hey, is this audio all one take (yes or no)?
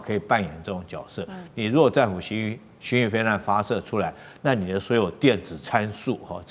yes